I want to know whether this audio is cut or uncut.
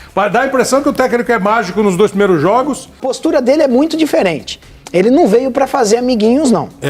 cut